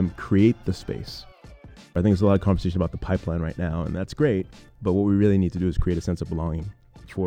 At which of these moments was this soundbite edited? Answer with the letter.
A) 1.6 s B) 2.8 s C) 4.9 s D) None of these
A